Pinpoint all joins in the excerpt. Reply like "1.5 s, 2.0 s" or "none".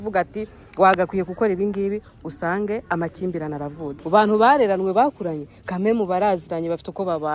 4.0 s